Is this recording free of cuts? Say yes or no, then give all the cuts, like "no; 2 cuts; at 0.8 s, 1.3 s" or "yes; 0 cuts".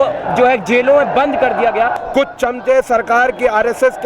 no; 1 cut; at 2.0 s